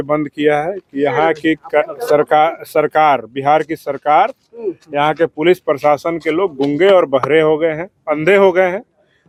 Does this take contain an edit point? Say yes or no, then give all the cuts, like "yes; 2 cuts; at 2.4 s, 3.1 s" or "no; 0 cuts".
no; 0 cuts